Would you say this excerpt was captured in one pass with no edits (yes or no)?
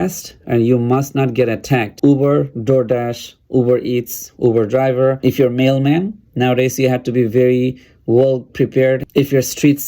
no